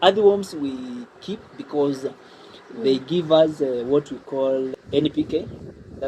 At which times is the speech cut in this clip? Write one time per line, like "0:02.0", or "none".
0:04.8